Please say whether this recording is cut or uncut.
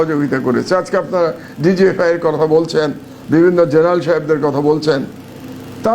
uncut